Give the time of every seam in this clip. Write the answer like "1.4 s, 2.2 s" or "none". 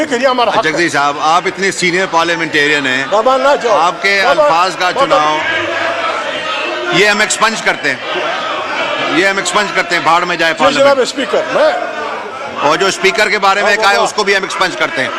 none